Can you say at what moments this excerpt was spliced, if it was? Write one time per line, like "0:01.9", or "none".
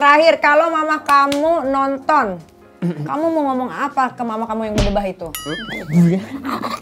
none